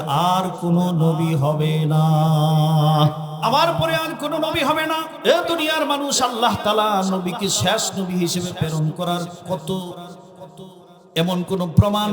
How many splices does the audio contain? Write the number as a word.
two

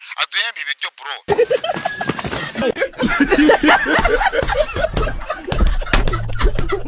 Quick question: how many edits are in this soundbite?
zero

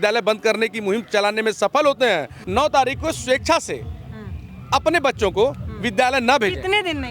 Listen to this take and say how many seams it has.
one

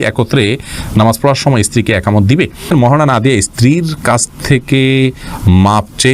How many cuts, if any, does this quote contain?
one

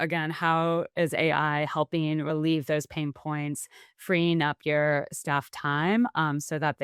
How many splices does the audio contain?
zero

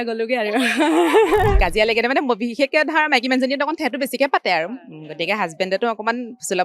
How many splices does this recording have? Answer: one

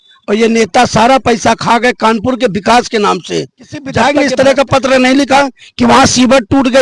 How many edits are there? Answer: one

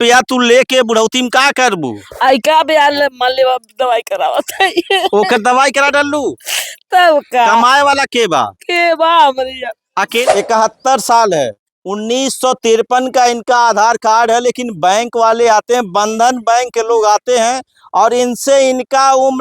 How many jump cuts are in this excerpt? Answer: one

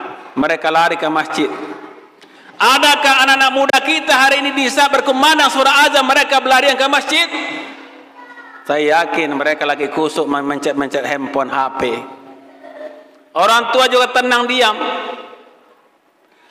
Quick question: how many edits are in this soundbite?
zero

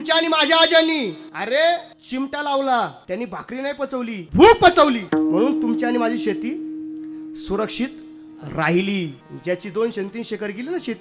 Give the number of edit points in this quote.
six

